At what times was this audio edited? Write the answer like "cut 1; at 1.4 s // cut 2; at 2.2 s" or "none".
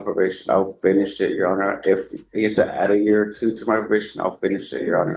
none